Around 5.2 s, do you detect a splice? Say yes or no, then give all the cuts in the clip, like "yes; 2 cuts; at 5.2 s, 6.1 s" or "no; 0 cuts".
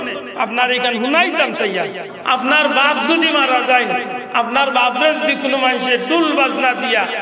no; 1 cut; at 2.1 s